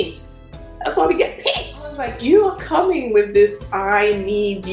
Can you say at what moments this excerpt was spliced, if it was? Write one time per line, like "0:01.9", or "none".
0:02.1